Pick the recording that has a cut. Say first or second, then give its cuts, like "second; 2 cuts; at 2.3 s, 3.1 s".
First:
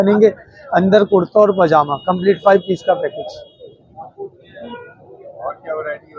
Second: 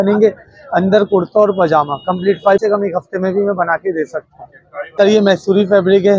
second; 2 cuts; at 2.6 s, 4.8 s